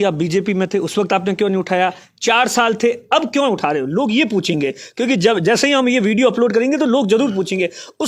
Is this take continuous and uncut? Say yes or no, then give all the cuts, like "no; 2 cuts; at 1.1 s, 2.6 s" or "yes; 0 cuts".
yes; 0 cuts